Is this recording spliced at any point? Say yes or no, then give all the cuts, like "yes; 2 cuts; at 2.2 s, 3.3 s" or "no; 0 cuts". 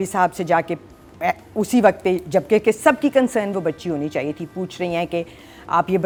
no; 0 cuts